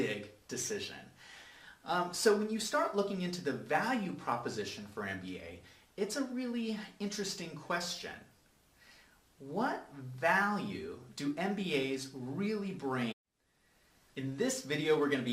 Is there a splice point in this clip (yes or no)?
no